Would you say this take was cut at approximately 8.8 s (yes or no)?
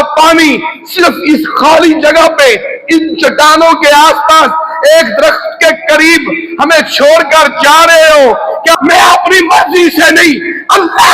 yes